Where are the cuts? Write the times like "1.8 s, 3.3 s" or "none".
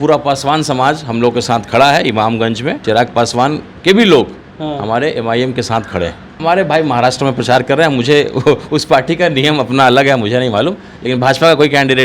2.8 s, 6.3 s

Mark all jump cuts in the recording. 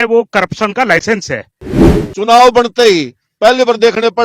1.9 s

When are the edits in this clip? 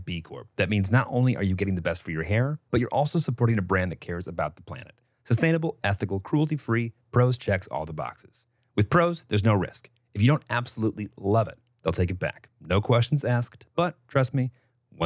none

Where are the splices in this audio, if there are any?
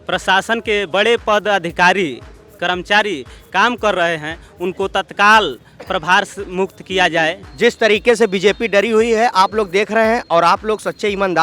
7.4 s

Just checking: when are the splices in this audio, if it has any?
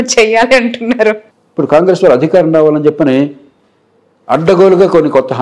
1.3 s

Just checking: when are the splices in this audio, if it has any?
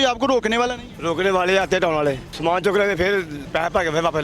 2.3 s, 3.4 s

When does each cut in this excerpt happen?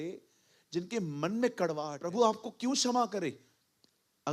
2.0 s

